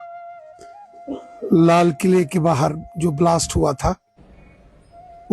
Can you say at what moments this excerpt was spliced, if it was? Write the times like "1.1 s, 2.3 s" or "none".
0.9 s